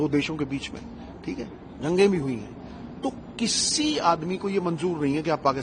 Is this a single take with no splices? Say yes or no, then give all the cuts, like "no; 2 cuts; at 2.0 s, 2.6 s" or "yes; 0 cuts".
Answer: yes; 0 cuts